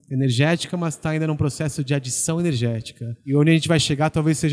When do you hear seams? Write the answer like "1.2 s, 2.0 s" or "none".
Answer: 3.2 s